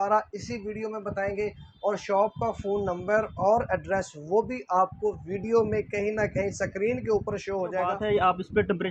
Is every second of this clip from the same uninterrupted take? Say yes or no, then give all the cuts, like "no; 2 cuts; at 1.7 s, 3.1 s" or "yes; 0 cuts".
no; 1 cut; at 8.0 s